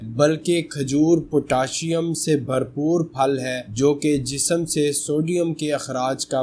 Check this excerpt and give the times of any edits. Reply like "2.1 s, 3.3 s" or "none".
none